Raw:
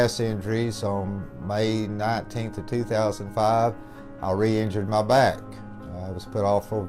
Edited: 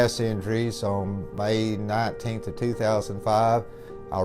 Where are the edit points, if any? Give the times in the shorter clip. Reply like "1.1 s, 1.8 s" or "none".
1.2 s